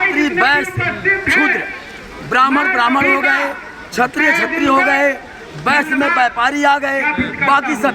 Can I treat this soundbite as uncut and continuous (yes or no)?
yes